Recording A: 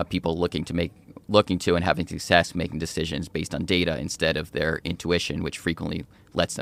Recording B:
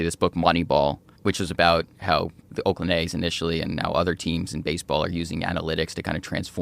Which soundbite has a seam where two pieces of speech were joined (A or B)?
B